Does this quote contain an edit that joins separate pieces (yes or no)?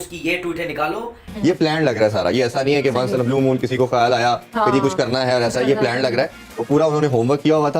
yes